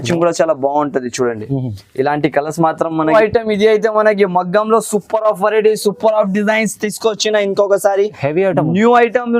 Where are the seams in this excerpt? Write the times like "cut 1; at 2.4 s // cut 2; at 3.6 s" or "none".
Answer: cut 1; at 3.1 s